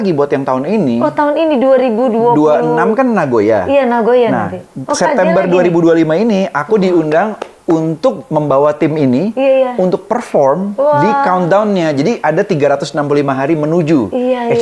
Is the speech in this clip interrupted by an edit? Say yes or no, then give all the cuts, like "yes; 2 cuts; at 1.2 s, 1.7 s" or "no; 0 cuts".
no; 0 cuts